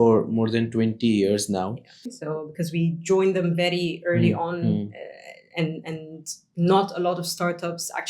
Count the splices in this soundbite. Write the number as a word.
one